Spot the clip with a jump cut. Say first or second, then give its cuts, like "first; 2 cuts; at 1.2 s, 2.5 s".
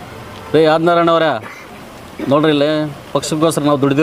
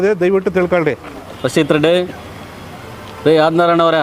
second; 1 cut; at 1.2 s